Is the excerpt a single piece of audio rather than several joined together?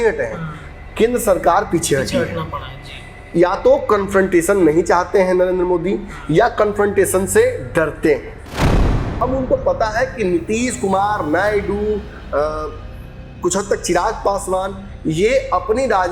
no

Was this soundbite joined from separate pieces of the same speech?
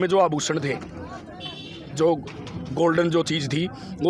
no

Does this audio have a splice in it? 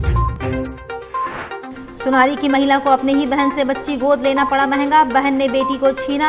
yes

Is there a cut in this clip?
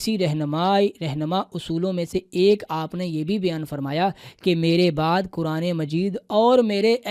no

